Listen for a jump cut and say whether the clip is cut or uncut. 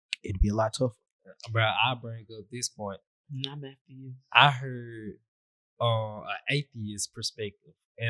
uncut